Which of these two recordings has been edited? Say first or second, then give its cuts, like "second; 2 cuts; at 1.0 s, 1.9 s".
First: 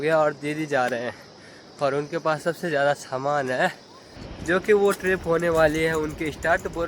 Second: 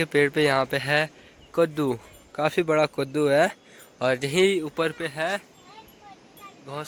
first; 1 cut; at 4.3 s